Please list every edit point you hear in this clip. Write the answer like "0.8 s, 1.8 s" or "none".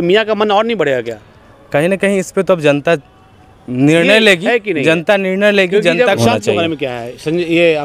6.2 s